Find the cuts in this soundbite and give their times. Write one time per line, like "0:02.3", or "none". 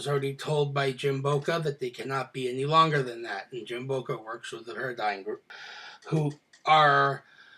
0:04.8